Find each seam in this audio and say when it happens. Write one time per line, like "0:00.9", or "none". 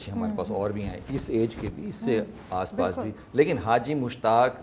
none